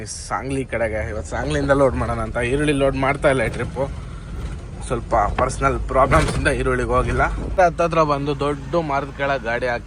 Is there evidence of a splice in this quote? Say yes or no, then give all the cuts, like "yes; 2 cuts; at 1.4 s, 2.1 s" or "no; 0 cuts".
yes; 1 cut; at 7.6 s